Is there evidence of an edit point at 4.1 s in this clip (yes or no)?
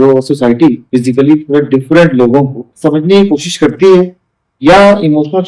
no